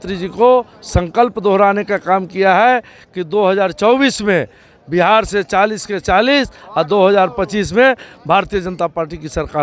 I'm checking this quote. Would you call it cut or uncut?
uncut